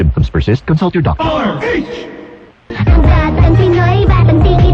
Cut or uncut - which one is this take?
uncut